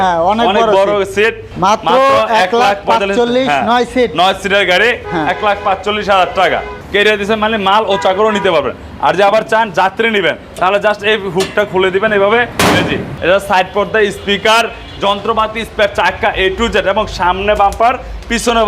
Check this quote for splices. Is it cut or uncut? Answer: cut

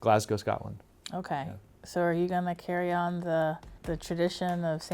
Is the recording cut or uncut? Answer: cut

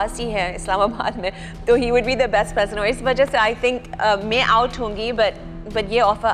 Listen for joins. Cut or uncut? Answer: uncut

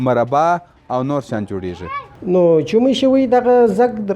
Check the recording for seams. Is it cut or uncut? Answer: cut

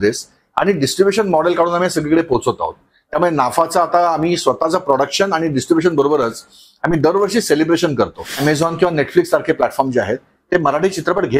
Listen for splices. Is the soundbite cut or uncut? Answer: cut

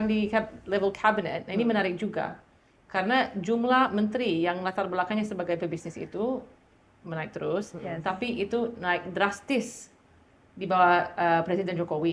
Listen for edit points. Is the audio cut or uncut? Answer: uncut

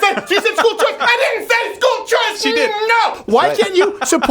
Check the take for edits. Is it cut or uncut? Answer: cut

